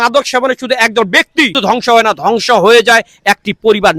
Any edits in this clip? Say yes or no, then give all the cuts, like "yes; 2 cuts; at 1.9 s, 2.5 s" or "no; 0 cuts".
yes; 1 cut; at 1.6 s